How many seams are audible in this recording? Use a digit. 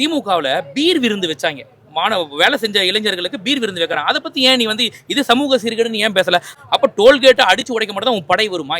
1